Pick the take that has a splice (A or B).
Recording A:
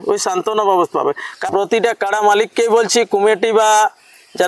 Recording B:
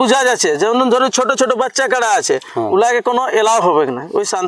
A